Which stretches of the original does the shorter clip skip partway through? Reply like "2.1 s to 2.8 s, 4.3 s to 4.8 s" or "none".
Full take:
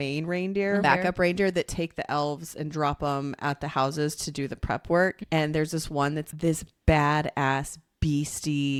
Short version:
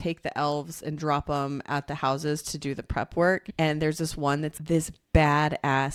none